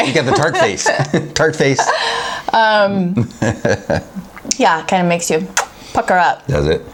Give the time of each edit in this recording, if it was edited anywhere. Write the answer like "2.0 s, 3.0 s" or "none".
none